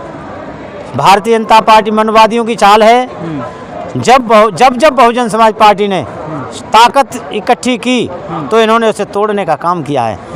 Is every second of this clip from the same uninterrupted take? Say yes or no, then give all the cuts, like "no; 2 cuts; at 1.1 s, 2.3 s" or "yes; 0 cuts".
yes; 0 cuts